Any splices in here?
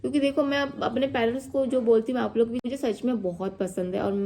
yes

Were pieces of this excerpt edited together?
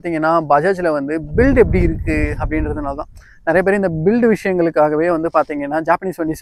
no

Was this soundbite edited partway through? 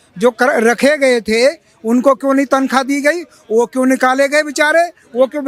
no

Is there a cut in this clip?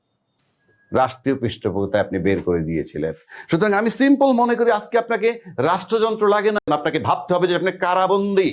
yes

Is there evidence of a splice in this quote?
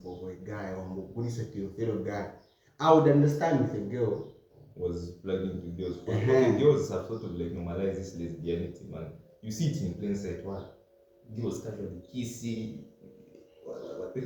no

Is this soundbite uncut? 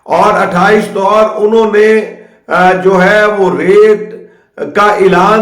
no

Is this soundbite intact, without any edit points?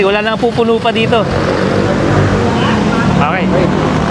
yes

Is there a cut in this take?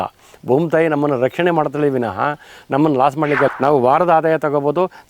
yes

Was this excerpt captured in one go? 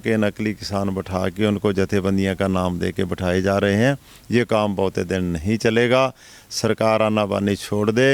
yes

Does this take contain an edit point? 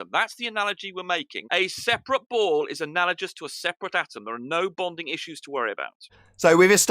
yes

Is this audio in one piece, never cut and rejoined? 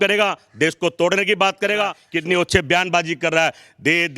no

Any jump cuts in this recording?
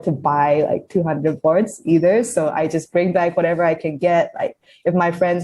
no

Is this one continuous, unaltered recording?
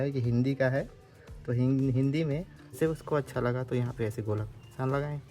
no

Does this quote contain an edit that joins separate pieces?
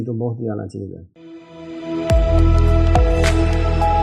no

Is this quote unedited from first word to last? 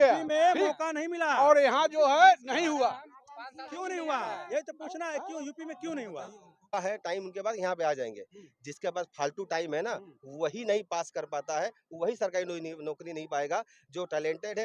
no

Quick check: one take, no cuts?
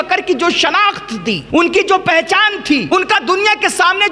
no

